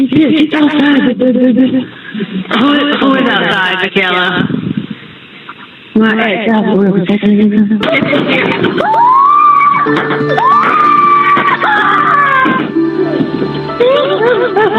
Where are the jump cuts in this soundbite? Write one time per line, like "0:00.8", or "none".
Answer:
0:07.8

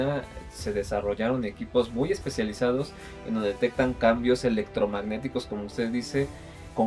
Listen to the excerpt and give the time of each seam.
none

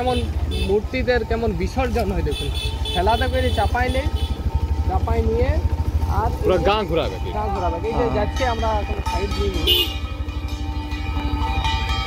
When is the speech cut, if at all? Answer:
none

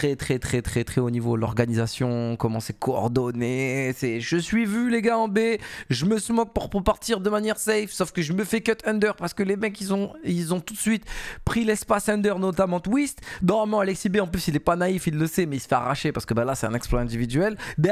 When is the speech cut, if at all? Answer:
none

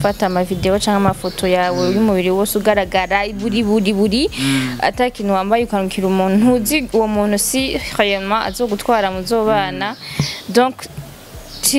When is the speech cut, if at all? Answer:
none

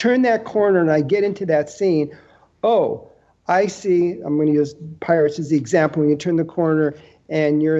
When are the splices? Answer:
none

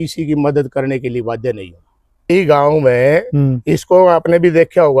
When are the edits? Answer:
0:02.3

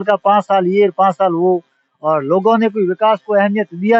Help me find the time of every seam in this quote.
none

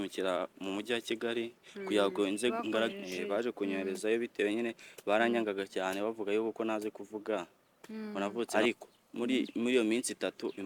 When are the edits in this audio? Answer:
0:02.9
0:08.5

